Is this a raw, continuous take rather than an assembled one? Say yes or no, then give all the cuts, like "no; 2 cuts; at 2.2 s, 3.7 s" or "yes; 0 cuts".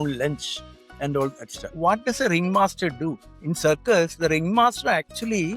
no; 2 cuts; at 1.7 s, 3.3 s